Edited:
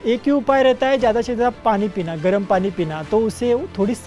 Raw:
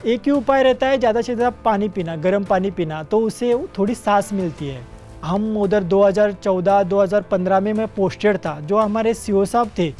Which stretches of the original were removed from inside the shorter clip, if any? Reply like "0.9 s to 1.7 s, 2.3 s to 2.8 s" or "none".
none

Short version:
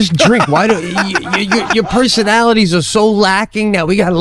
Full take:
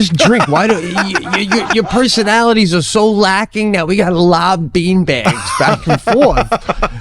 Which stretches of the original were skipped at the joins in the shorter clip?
none

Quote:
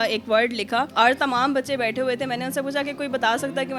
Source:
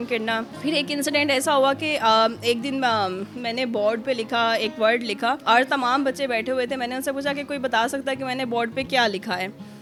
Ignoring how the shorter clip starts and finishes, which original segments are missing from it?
none

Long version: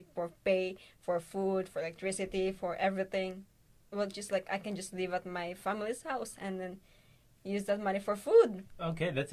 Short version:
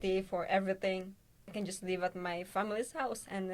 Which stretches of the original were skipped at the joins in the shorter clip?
3.8 s to 4.6 s

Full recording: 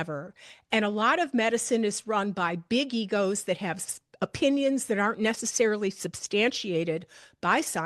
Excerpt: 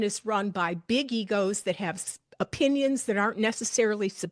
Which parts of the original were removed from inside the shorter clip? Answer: none

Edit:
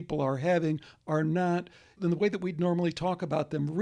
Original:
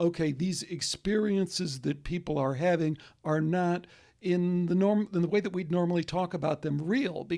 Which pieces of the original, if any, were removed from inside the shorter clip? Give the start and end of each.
4.1 s to 5.1 s

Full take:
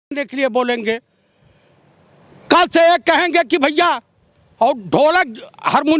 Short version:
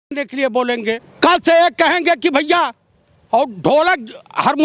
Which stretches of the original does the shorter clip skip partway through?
1.1 s to 2.4 s

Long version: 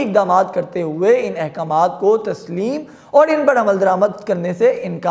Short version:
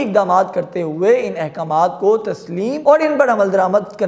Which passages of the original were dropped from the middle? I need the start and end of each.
2.8 s to 3.0 s

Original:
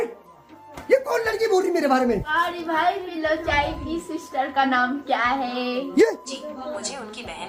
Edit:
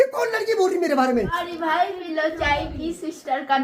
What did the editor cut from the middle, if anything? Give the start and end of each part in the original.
2.3 s to 2.4 s

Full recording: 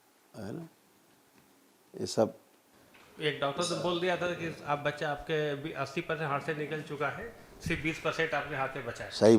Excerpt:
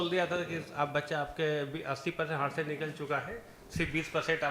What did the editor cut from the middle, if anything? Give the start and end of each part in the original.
none

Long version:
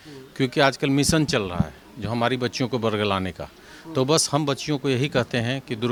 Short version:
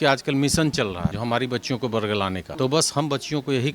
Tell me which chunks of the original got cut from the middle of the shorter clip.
1.7 s to 2.1 s, 3.3 s to 3.8 s

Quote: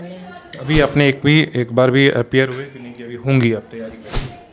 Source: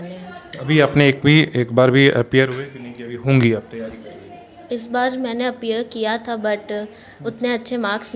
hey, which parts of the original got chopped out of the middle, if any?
none

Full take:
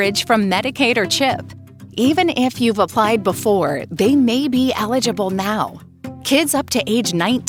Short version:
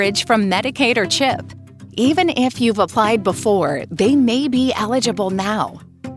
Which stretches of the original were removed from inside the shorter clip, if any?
none

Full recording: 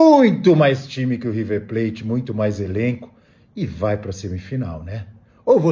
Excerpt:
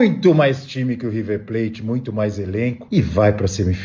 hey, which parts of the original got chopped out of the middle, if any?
3.0 s to 3.5 s

